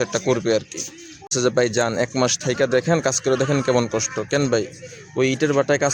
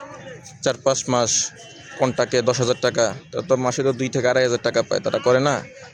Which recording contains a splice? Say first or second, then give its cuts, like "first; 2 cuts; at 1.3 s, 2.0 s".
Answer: first; 1 cut; at 1.3 s